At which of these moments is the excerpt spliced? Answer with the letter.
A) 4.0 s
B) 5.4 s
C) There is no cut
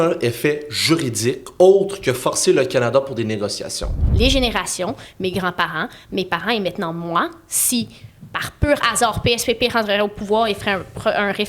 A